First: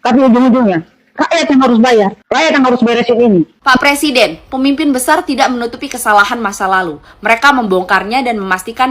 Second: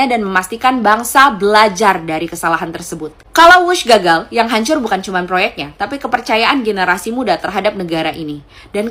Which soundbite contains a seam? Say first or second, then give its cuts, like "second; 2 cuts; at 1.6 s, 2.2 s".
first; 1 cut; at 3.6 s